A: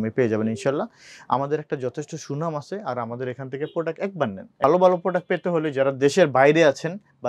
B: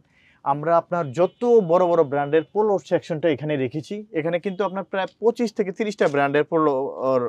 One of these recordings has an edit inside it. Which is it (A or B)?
A